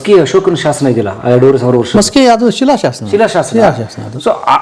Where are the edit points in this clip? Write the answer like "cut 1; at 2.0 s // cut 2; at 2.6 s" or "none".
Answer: none